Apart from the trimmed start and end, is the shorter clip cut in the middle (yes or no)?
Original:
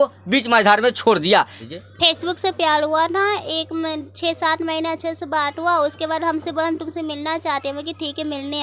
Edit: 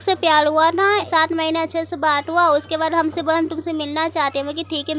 yes